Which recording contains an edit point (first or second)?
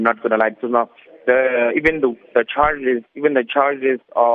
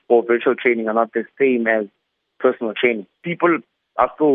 second